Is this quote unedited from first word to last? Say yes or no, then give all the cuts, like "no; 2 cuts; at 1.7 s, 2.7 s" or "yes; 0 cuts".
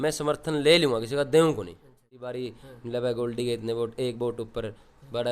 no; 1 cut; at 2.3 s